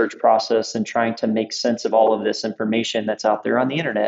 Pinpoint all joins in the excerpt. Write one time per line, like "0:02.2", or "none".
none